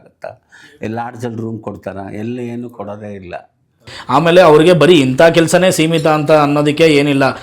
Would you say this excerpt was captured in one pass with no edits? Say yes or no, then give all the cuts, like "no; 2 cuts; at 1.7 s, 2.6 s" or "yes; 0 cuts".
no; 1 cut; at 3.9 s